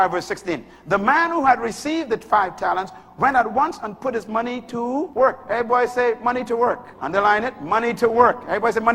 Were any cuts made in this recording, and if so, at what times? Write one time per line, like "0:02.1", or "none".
0:05.1
0:06.9